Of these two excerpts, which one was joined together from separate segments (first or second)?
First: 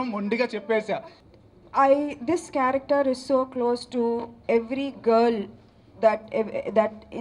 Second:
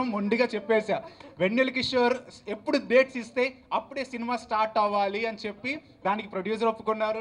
first